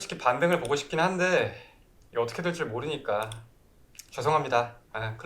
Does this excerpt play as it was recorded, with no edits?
yes; 0 cuts

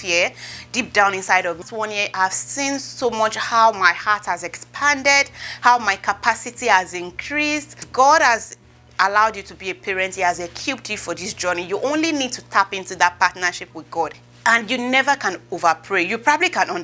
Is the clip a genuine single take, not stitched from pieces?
no; 3 cuts; at 1.6 s, 7.8 s, 14.3 s

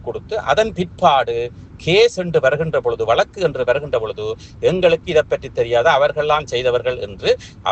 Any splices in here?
no; 0 cuts

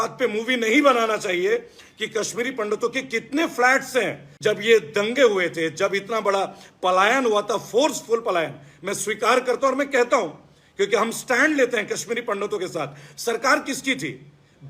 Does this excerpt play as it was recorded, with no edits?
no; 1 cut; at 4.2 s

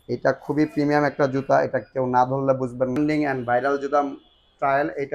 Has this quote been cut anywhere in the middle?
yes; 1 cut; at 3.0 s

